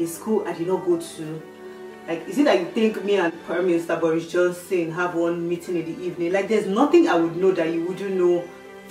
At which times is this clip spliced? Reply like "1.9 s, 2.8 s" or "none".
none